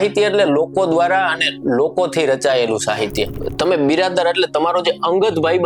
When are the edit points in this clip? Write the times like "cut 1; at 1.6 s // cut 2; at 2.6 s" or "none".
cut 1; at 3.3 s